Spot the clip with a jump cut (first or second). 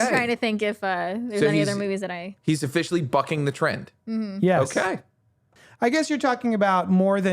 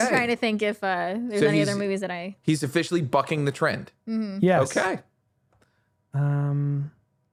first